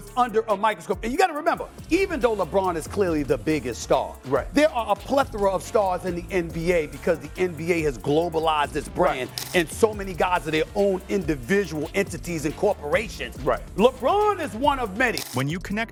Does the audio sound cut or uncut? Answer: uncut